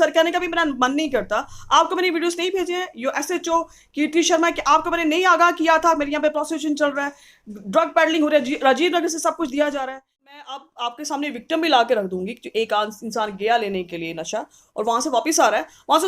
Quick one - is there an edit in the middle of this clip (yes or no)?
yes